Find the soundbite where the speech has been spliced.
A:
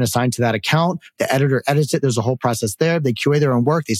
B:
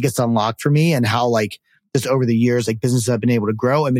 A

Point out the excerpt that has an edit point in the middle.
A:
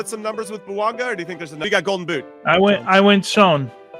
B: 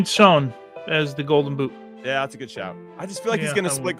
A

